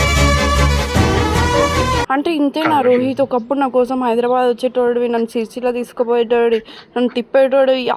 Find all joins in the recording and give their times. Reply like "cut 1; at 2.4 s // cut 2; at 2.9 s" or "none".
cut 1; at 2.1 s